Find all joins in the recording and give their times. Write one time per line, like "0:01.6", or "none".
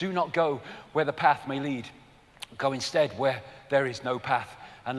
none

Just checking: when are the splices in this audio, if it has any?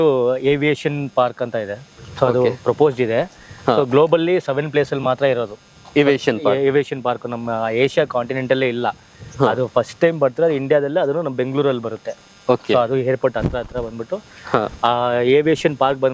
none

